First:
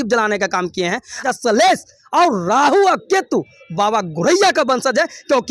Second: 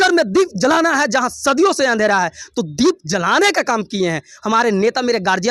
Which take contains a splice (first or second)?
first